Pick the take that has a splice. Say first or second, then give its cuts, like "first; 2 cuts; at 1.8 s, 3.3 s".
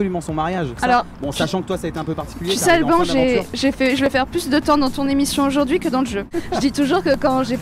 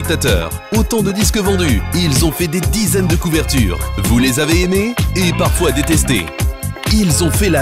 first; 2 cuts; at 0.8 s, 6.3 s